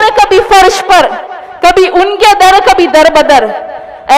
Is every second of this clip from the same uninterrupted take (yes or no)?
yes